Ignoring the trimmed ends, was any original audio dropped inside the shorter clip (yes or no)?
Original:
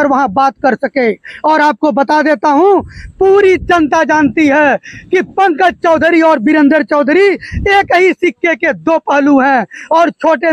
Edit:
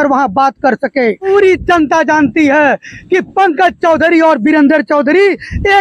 yes